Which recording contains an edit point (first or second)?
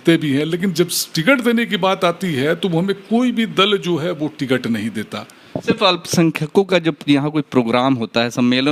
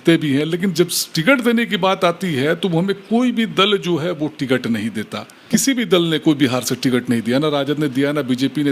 second